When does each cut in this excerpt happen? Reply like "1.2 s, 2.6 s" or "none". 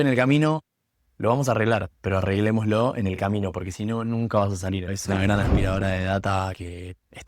4.9 s